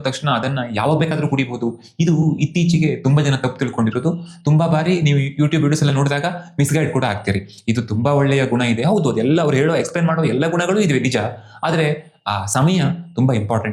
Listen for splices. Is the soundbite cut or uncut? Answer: uncut